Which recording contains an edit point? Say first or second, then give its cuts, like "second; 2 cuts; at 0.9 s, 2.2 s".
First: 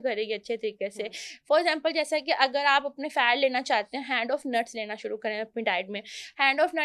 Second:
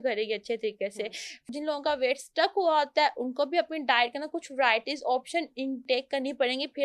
second; 1 cut; at 1.5 s